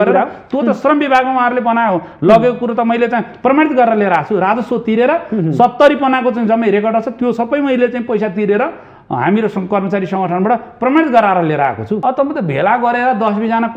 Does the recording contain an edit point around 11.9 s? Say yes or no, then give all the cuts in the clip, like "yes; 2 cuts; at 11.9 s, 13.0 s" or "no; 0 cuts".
yes; 1 cut; at 11.9 s